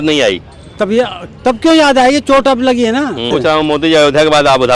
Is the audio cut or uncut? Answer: cut